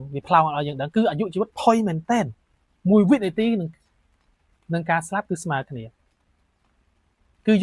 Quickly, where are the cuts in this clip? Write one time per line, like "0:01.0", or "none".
none